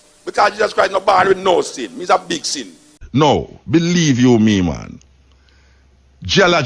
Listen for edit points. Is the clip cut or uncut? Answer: cut